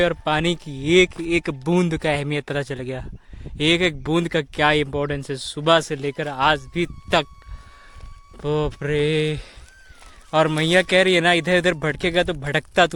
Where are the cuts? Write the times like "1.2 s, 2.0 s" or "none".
none